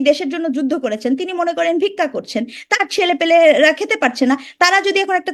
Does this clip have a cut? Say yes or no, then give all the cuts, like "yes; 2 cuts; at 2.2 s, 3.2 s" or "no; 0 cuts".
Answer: no; 0 cuts